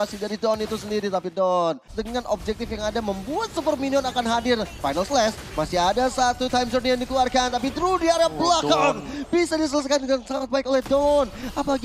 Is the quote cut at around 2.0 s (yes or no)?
yes